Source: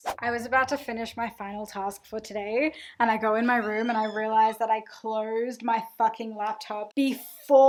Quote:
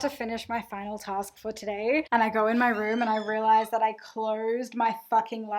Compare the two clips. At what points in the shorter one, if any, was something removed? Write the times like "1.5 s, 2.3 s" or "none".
2.1 s